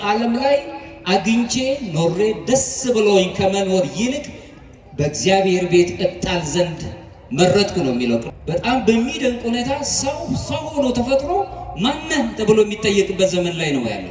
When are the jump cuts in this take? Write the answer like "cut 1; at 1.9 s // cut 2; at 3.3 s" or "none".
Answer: cut 1; at 8.3 s